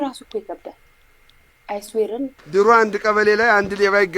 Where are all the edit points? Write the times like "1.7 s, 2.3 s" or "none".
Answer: 2.4 s